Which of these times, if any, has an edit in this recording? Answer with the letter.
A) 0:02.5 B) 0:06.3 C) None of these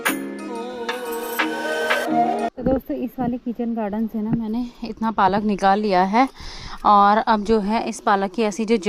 A